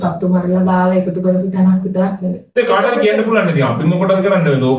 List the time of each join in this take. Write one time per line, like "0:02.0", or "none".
0:02.4